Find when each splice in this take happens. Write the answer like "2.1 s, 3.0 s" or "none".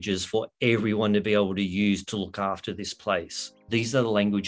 3.6 s

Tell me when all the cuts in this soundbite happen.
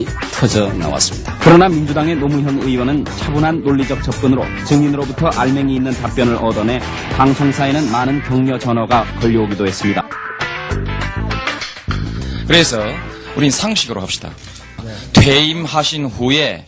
none

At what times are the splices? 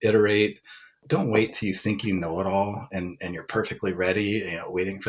1.0 s

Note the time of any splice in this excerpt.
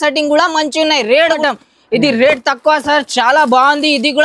1.4 s

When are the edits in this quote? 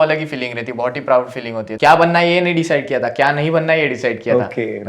1.7 s

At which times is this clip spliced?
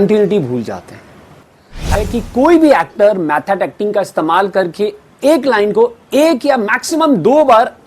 1.9 s

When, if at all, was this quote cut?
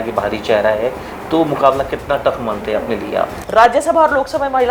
3.4 s

